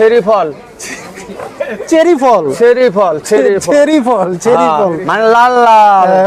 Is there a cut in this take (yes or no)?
no